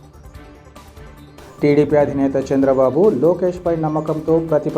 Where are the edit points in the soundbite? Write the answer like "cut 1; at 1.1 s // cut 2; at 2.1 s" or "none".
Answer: cut 1; at 1.0 s